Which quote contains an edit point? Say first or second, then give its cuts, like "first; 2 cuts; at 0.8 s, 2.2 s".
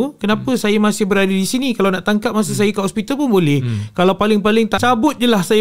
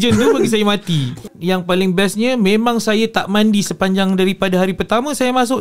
second; 1 cut; at 1.3 s